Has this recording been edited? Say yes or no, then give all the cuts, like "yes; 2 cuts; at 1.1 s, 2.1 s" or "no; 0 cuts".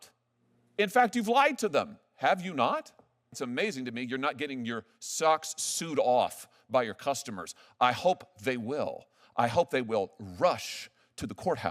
yes; 1 cut; at 3.4 s